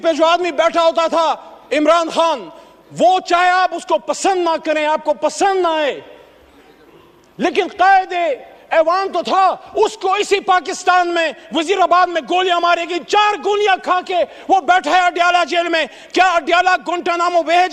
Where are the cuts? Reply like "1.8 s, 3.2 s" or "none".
none